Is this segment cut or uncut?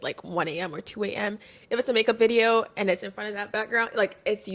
uncut